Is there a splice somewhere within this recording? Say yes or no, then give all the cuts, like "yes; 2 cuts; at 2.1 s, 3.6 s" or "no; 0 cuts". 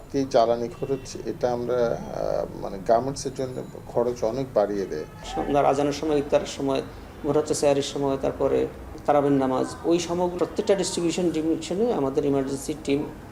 yes; 3 cuts; at 5.2 s, 8.9 s, 10.3 s